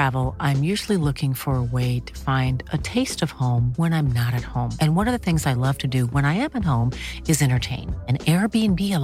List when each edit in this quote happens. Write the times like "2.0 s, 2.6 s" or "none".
none